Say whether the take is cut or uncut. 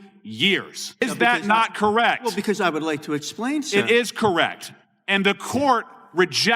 cut